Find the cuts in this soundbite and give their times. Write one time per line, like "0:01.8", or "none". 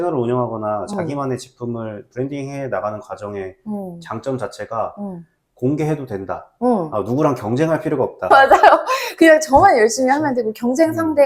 none